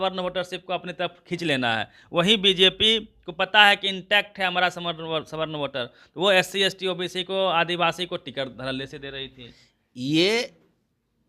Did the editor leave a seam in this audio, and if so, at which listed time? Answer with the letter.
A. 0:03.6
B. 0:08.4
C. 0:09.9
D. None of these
D